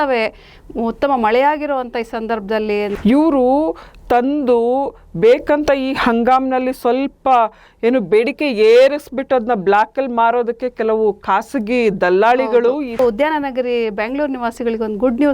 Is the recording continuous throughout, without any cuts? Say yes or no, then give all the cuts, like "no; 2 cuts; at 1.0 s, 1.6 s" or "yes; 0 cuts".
no; 2 cuts; at 2.9 s, 13.0 s